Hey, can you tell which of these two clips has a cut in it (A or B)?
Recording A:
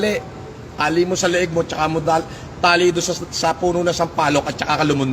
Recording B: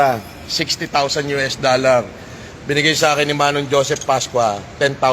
B